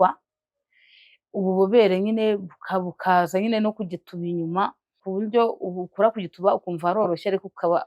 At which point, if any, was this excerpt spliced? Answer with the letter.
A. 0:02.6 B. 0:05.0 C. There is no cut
B